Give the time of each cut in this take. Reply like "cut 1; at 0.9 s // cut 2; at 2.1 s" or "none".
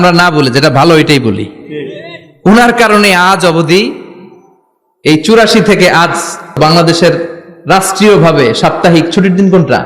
cut 1; at 6.6 s